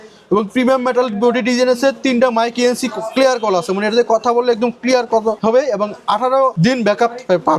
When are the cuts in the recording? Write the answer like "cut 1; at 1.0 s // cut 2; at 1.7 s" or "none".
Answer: cut 1; at 5.4 s // cut 2; at 6.5 s